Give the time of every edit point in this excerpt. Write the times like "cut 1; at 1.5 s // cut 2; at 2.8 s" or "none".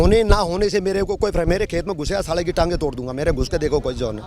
none